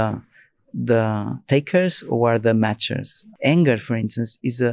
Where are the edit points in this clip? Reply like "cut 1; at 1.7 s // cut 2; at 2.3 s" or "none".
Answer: cut 1; at 3.1 s